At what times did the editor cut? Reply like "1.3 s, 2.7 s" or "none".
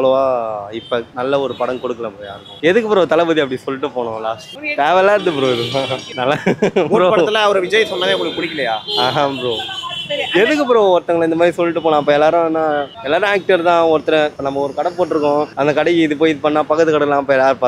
none